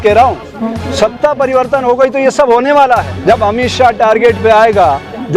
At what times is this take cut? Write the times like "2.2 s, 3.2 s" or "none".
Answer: 3.1 s